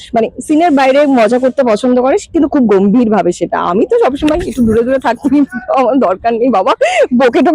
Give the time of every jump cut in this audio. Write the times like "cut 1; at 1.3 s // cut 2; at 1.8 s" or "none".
none